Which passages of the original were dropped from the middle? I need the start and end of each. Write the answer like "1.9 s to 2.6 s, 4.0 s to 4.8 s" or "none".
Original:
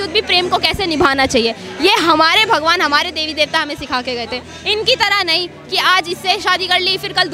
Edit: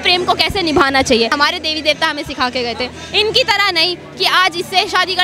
1.6 s to 2.9 s